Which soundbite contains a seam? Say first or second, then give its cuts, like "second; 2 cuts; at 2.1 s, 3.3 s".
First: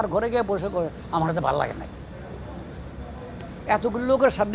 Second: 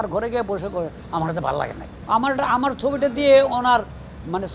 second; 1 cut; at 1.9 s